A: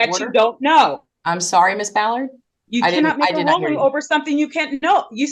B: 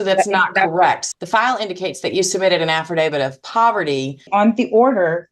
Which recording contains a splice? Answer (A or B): B